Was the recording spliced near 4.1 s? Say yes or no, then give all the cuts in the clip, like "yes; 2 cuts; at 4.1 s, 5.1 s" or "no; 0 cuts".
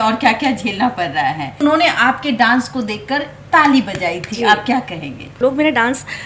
no; 2 cuts; at 1.6 s, 5.3 s